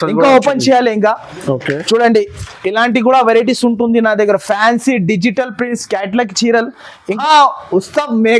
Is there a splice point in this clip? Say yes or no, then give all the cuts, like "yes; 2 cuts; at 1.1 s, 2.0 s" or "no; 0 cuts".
yes; 1 cut; at 7.2 s